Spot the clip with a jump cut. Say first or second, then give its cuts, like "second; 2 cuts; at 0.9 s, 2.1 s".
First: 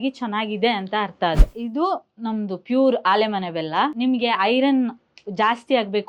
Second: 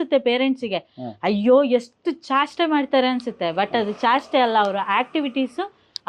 first; 2 cuts; at 1.5 s, 3.9 s